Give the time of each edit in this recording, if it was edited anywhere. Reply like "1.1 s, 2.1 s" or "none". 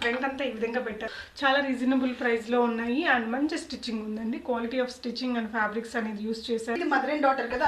1.1 s, 6.8 s